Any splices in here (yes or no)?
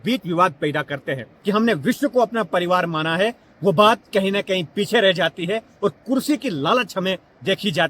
yes